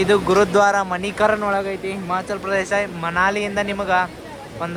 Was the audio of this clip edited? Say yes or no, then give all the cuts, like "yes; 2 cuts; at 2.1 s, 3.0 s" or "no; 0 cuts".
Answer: no; 0 cuts